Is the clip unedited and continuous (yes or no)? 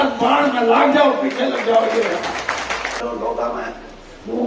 no